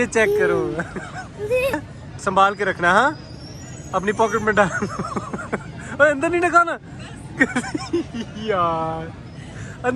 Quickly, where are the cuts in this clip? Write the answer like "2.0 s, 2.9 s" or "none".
1.8 s